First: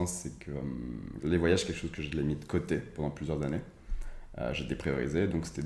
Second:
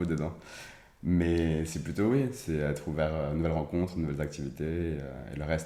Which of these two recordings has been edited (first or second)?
first